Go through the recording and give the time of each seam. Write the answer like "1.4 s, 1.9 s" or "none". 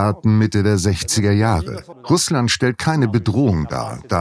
1.9 s